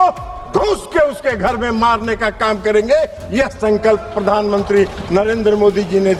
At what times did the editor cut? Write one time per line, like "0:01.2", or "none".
none

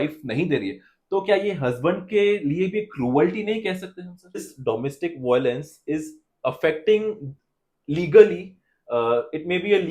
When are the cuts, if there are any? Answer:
0:04.5

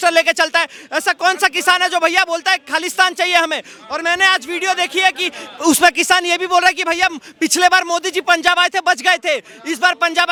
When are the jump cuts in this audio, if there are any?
none

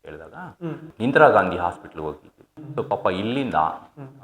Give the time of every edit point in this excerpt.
0:00.9
0:02.5

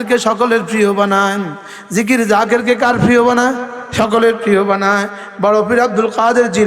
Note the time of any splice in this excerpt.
none

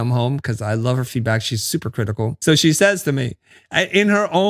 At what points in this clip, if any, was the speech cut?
0:02.4

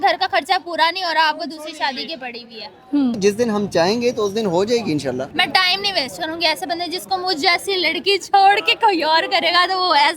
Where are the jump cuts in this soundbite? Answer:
0:03.2
0:05.3

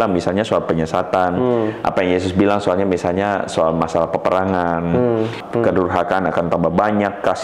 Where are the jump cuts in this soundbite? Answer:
0:05.4

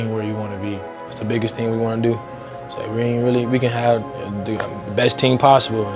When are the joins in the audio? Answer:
0:01.3

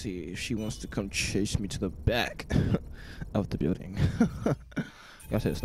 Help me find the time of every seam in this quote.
none

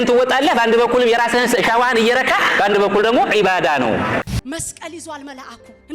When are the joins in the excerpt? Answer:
0:04.3

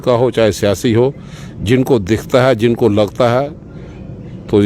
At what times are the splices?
none

